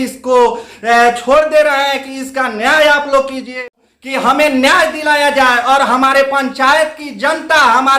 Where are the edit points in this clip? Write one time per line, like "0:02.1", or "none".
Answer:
0:03.6